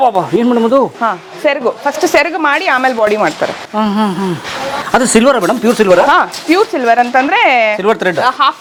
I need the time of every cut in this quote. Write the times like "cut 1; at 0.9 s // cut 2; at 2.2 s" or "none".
none